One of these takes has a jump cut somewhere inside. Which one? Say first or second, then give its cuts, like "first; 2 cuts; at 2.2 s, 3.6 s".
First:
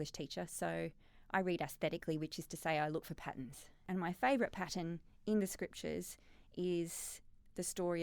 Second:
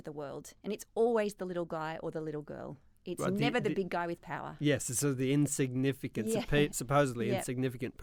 first; 1 cut; at 3.8 s